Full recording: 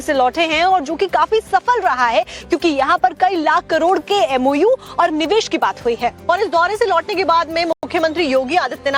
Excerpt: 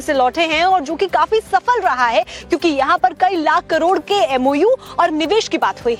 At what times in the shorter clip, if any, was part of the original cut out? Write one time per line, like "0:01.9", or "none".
none